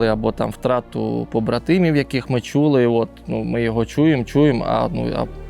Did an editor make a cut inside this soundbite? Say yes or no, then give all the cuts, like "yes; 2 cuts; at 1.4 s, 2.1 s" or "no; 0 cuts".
no; 0 cuts